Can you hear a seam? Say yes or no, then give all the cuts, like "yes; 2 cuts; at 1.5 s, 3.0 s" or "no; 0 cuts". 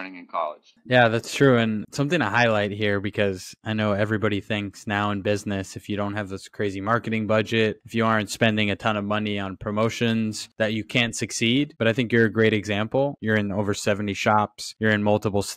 yes; 1 cut; at 13.2 s